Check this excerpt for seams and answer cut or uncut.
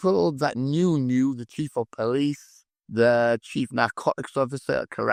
uncut